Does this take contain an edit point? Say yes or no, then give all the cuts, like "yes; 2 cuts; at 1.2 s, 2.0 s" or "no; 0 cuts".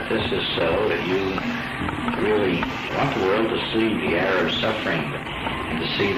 no; 0 cuts